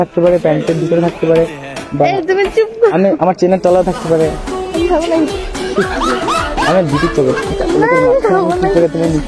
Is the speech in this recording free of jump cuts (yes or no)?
yes